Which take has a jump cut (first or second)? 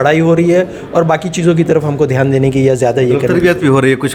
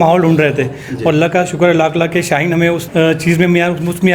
second